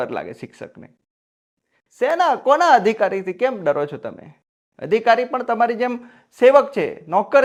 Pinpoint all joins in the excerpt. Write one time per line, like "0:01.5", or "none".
none